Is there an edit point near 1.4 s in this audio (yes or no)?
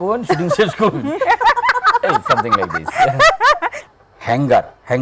no